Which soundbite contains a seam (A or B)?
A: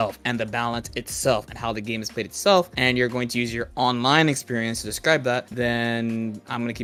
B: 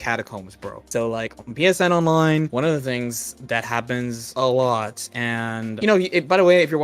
B